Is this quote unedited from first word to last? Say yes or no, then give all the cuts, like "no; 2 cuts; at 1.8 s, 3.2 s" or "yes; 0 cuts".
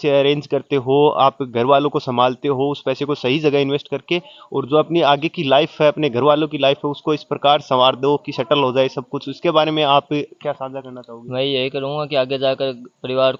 yes; 0 cuts